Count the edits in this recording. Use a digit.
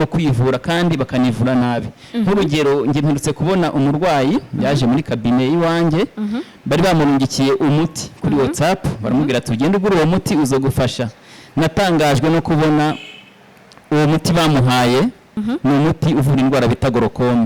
1